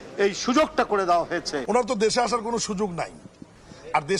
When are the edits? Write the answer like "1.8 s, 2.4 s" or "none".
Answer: 1.5 s

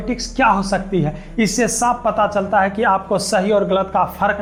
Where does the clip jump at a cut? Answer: none

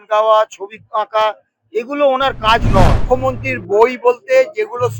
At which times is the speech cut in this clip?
3.0 s

